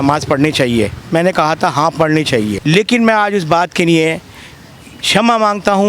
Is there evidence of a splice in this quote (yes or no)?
yes